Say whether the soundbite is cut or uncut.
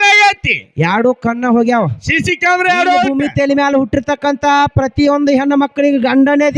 cut